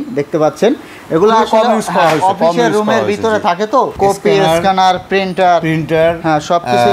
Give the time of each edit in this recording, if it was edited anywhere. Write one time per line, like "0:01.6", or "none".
0:03.9